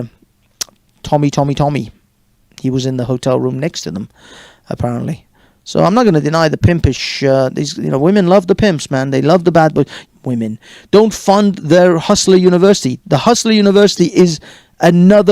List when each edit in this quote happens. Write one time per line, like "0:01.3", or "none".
0:10.0